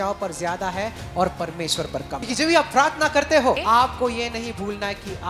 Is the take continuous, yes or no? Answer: no